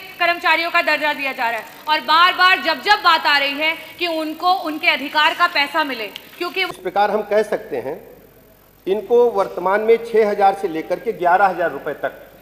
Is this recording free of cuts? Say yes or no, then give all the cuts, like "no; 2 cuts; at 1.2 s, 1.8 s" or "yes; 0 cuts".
no; 1 cut; at 6.7 s